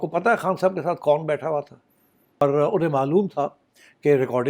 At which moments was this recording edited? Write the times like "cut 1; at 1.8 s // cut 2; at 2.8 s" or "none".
cut 1; at 2.4 s

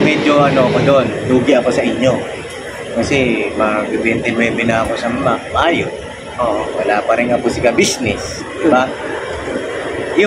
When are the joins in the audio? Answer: none

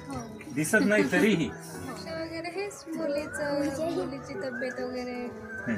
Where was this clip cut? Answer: cut 1; at 2.0 s

